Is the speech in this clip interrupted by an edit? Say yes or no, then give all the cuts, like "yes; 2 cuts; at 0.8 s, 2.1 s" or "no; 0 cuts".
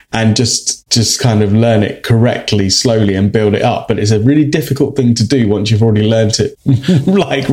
yes; 1 cut; at 6.6 s